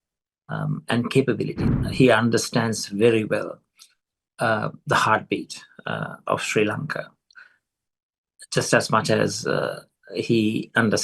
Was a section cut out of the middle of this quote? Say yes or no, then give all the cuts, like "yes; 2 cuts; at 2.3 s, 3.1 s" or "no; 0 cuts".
yes; 1 cut; at 1.6 s